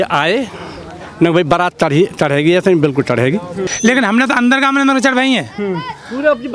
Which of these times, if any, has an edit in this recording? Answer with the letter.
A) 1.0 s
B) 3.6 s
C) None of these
B